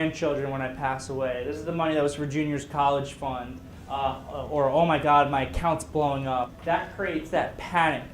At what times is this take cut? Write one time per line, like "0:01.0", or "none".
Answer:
0:06.5